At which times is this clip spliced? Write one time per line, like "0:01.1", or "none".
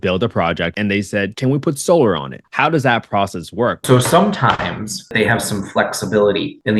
0:01.1
0:02.4
0:03.8
0:05.1